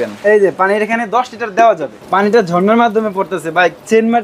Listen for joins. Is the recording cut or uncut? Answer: cut